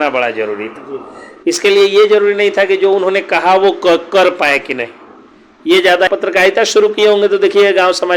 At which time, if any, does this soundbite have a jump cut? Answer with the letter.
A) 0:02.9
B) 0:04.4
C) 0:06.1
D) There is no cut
C